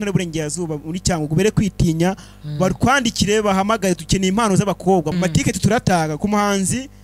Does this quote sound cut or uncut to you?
cut